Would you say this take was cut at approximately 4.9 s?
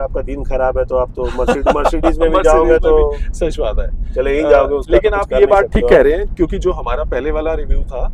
no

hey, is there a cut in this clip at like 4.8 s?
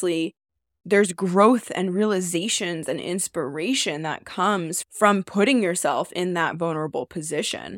yes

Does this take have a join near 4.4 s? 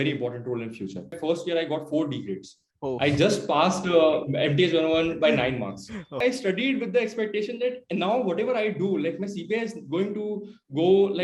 no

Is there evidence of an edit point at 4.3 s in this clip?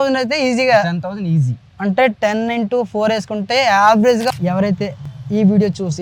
yes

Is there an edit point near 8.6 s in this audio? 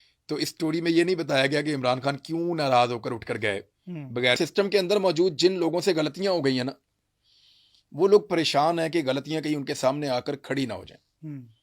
no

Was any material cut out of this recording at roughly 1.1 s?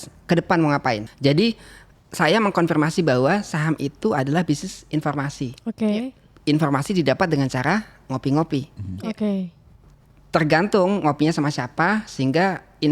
yes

